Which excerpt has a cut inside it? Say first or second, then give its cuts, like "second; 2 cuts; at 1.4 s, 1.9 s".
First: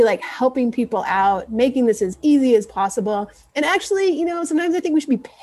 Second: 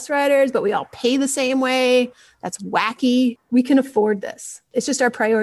second; 2 cuts; at 3.4 s, 4.6 s